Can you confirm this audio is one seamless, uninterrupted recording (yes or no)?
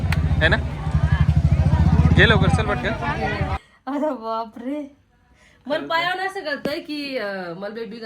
no